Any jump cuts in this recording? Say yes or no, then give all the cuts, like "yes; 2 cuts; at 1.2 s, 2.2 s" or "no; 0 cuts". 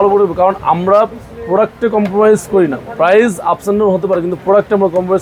no; 0 cuts